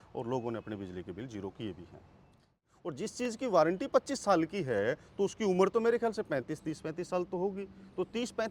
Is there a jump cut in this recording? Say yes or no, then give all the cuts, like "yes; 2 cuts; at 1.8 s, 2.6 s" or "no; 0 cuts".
yes; 1 cut; at 2.8 s